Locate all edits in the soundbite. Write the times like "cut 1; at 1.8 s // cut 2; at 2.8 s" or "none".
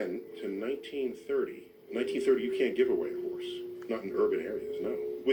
none